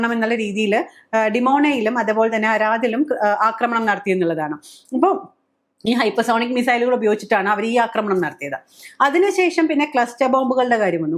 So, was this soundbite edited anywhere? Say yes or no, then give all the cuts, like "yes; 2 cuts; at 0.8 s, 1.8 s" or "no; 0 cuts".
no; 0 cuts